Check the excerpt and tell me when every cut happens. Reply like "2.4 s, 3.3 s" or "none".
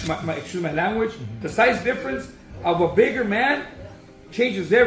none